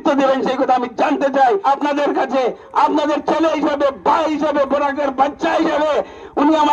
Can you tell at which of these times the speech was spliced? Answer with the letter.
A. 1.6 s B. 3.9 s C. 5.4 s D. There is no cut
A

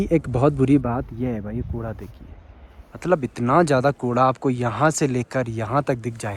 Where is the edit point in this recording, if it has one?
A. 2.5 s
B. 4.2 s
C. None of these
C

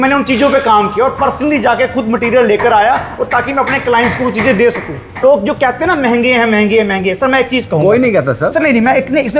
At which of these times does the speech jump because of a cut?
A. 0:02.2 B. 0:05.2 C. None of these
B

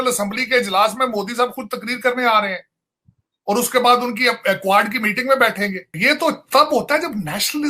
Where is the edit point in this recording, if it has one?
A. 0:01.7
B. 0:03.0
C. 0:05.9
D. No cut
C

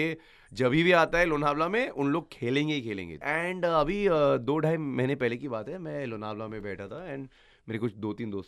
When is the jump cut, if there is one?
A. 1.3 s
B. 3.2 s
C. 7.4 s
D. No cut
B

